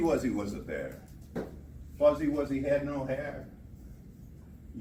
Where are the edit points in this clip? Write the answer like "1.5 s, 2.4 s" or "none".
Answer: none